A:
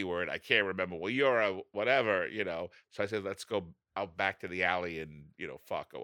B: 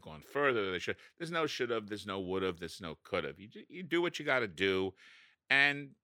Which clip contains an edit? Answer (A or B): A